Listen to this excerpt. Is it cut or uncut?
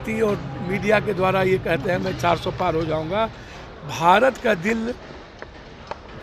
uncut